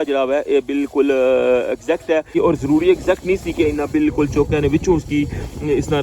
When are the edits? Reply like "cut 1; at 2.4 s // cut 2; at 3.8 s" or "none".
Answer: cut 1; at 2.3 s